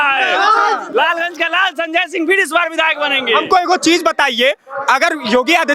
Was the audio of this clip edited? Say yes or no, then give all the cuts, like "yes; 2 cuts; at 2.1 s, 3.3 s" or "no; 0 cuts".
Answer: no; 0 cuts